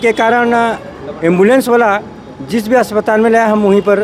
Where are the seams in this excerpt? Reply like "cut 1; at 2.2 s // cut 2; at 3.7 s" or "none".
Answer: none